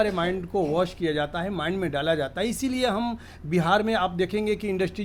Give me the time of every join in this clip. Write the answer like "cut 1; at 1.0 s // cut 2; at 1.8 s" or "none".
none